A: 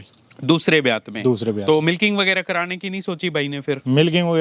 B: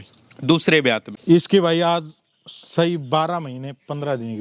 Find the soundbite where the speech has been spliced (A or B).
B